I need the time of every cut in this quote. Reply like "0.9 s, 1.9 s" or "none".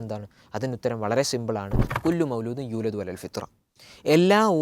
1.8 s